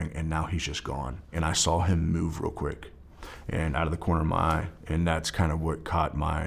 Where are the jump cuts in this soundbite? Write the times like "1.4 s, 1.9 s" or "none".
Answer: 1.4 s